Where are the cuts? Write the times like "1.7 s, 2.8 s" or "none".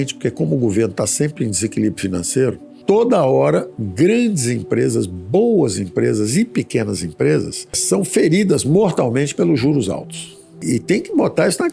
2.7 s, 3.8 s